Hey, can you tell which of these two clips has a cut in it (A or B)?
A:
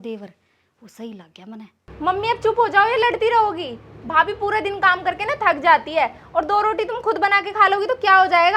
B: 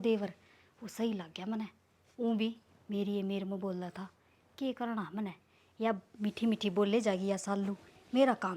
A